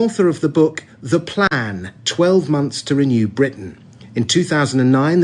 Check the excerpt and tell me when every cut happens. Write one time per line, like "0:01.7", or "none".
0:03.3